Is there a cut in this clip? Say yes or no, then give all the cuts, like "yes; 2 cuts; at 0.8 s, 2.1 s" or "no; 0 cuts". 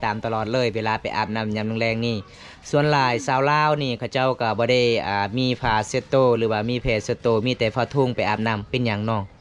no; 0 cuts